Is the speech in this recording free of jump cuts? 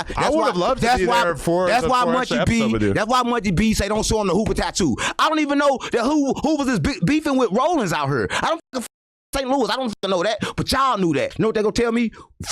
no; 1 cut; at 11.3 s

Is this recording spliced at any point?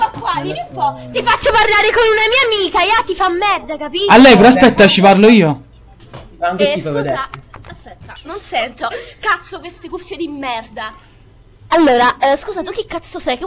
no; 0 cuts

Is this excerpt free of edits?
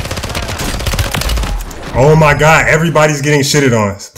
yes; 0 cuts

